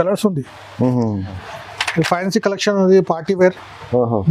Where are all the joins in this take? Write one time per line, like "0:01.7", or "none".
0:01.4